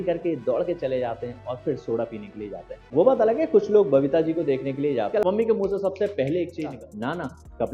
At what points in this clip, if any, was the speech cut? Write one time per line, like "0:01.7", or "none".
0:02.8
0:05.2
0:06.7